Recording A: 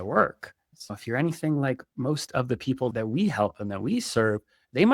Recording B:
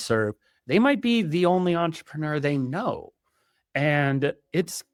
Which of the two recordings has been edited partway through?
A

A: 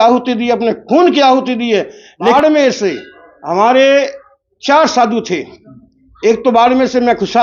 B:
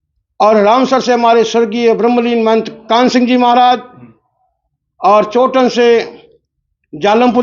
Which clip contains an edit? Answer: A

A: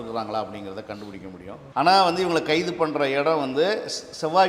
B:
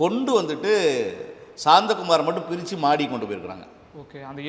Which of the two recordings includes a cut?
A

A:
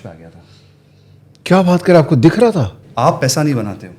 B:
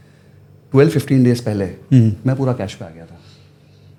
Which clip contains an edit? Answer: A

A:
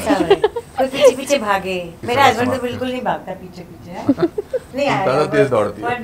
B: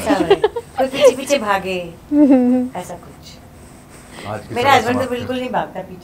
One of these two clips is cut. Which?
A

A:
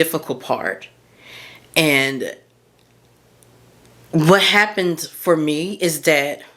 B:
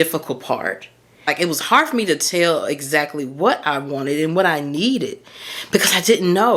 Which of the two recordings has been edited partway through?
B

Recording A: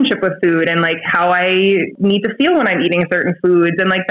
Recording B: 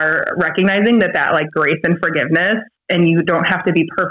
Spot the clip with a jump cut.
A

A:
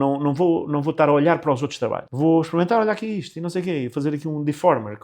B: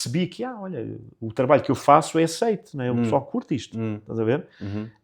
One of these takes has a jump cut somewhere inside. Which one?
A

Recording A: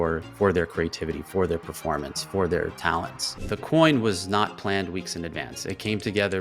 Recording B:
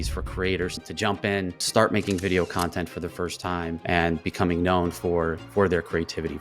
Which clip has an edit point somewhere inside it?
B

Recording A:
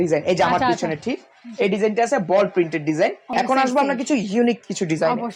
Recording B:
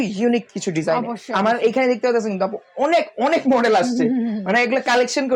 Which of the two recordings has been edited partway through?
A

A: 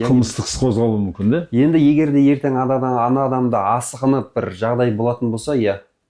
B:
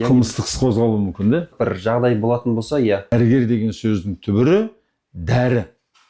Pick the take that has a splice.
B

